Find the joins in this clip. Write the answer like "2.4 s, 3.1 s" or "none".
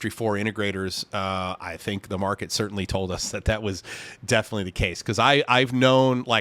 none